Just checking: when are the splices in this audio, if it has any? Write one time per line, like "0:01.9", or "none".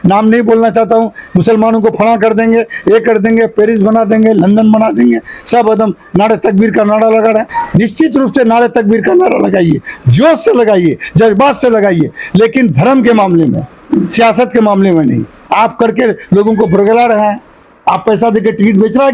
none